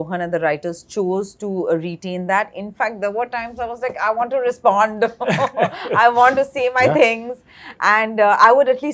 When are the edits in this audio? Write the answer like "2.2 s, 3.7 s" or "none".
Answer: none